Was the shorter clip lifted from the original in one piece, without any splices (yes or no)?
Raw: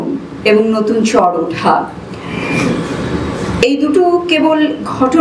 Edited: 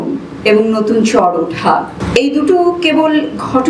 no